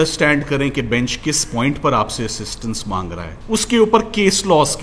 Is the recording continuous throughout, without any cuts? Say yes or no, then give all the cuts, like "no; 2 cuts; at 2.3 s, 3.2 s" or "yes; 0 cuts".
no; 1 cut; at 3.3 s